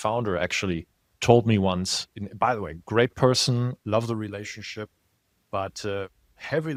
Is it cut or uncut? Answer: uncut